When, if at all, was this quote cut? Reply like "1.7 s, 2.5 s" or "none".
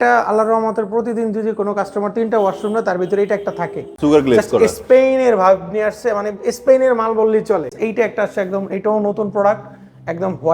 3.9 s, 7.7 s

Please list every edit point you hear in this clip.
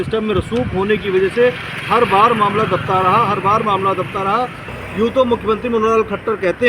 4.7 s

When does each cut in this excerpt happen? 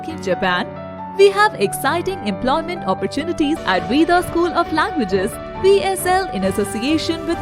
3.6 s

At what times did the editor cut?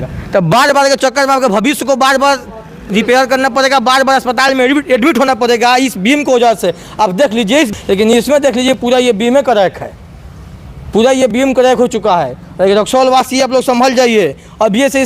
7.7 s

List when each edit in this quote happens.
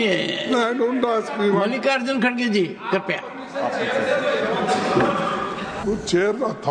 5.8 s

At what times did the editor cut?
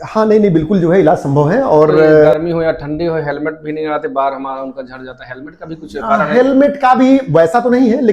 2.3 s

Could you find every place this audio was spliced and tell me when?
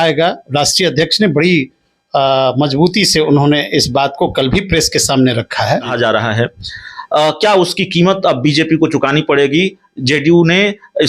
5.8 s

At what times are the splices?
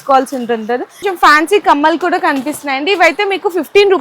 1.1 s

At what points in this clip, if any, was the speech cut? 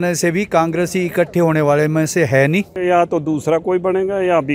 2.7 s

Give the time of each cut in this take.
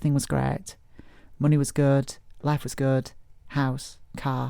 3.4 s

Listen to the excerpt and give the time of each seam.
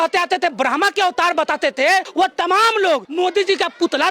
2.1 s, 3.1 s

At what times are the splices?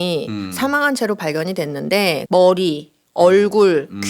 2.2 s

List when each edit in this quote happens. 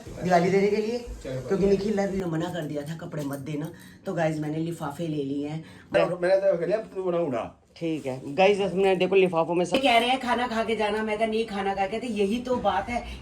2.2 s, 6.0 s, 9.7 s

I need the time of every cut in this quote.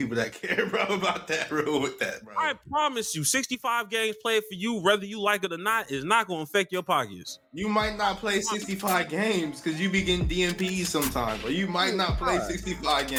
none

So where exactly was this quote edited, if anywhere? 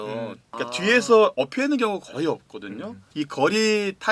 3.0 s

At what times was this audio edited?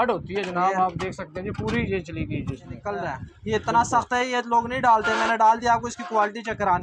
2.7 s

